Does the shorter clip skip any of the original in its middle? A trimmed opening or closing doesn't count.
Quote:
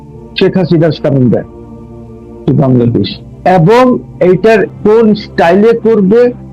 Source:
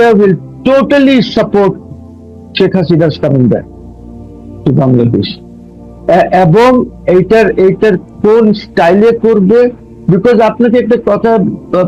yes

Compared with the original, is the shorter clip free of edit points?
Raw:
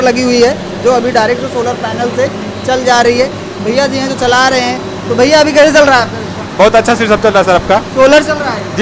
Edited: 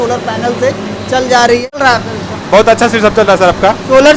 no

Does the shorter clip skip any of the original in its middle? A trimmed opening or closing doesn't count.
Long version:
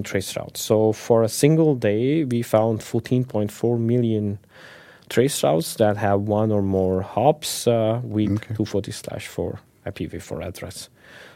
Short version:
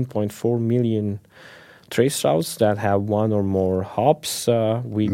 no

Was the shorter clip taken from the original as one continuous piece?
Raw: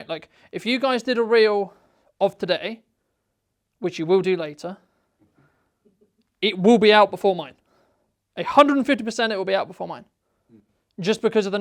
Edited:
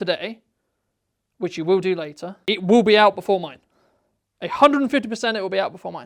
no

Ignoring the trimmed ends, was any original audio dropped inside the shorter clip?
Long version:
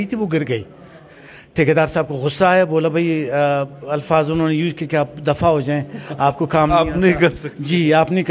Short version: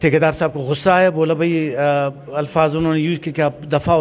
no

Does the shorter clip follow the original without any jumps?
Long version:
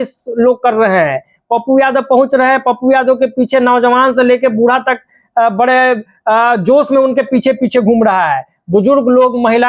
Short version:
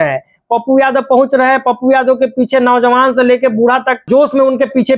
no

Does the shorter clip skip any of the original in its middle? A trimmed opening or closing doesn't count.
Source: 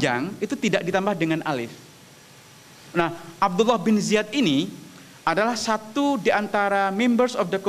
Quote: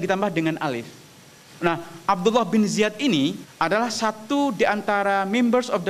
yes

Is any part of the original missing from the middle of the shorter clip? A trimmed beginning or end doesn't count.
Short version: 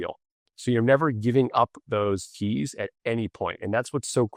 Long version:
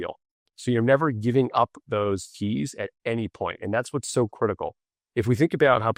no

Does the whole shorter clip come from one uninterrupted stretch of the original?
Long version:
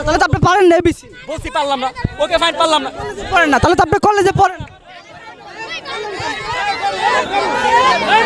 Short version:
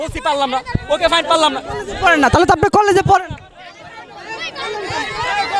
yes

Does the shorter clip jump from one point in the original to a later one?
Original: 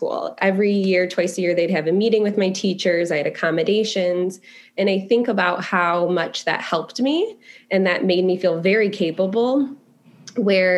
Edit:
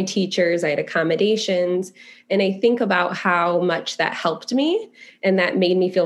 no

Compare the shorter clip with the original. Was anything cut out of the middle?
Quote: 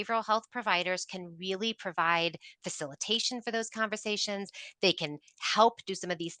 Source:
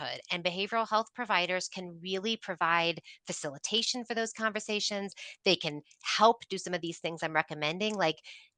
no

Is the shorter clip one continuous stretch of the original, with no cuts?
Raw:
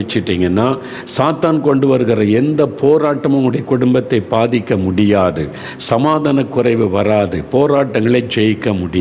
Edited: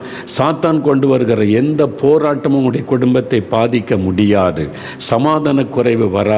yes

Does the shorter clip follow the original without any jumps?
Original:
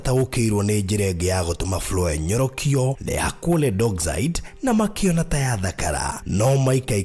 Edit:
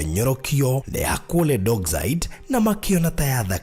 yes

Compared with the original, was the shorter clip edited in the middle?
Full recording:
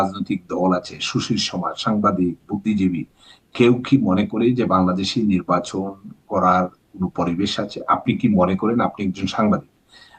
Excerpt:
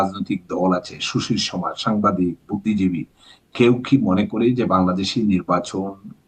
no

